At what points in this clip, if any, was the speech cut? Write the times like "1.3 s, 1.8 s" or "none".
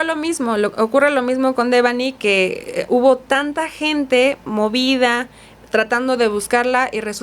none